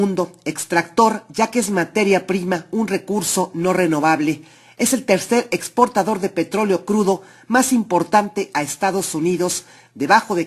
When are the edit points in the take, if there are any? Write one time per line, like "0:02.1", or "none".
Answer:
0:09.1